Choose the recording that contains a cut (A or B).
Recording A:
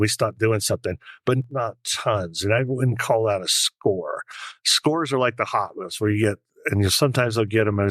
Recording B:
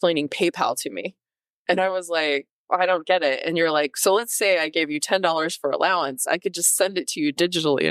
A